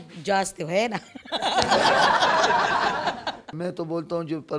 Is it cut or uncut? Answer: cut